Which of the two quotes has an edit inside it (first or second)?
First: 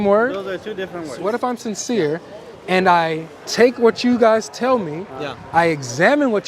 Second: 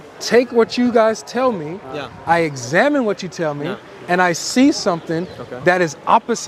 first